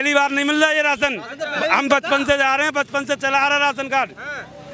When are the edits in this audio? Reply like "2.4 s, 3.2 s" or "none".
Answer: none